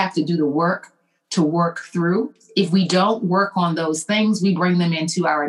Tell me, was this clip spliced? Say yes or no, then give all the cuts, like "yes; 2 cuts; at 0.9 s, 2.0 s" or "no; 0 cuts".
yes; 1 cut; at 2.4 s